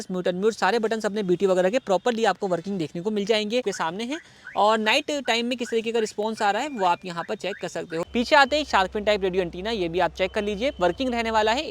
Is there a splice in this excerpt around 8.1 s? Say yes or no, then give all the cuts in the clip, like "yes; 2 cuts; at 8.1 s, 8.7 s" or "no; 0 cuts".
yes; 2 cuts; at 3.7 s, 8.1 s